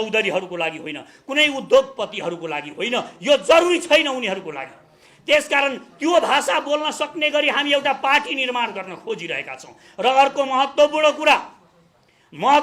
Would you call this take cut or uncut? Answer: uncut